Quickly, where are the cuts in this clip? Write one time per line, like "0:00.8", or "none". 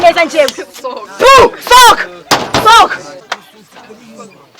0:03.2